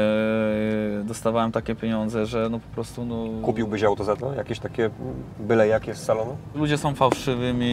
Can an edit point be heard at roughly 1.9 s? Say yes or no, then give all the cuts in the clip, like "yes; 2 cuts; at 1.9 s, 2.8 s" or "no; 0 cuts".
no; 1 cut; at 6.5 s